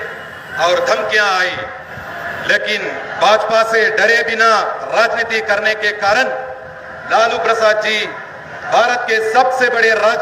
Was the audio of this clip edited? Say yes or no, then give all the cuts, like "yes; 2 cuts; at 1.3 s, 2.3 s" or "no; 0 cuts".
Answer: no; 0 cuts